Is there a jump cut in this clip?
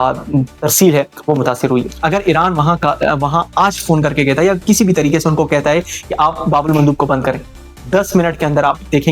yes; 1 cut; at 1.9 s

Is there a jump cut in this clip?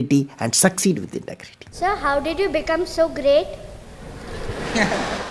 yes; 1 cut; at 1.8 s

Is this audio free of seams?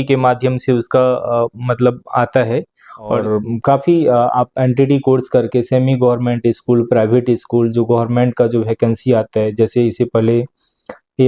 no; 1 cut; at 3.2 s

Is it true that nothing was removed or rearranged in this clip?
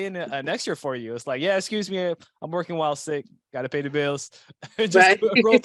yes; 0 cuts

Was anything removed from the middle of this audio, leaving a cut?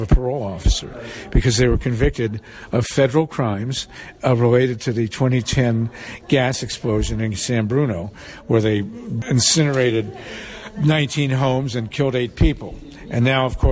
no; 0 cuts

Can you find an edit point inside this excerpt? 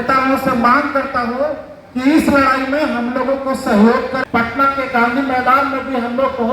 yes; 1 cut; at 4.1 s

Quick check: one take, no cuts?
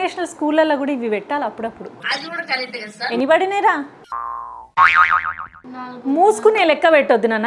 yes; 0 cuts

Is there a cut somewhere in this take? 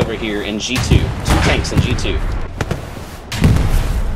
yes; 1 cut; at 2.4 s

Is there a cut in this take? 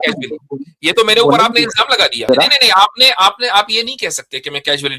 yes; 1 cut; at 2.3 s

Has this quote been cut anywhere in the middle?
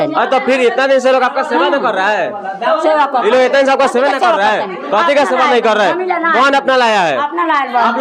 no; 0 cuts

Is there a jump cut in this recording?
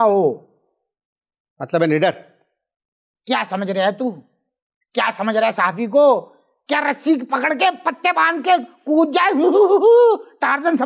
no; 0 cuts

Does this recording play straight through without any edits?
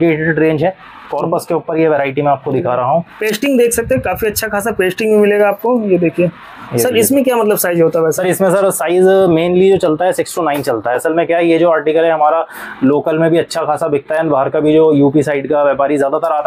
yes; 0 cuts

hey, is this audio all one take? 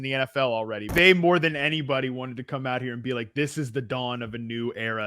no; 1 cut; at 0.9 s

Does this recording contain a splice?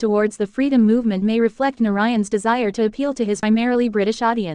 yes; 1 cut; at 3.4 s

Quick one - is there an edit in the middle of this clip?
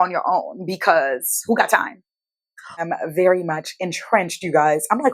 yes; 1 cut; at 2.8 s

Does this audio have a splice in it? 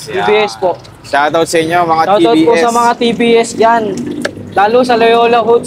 no; 0 cuts

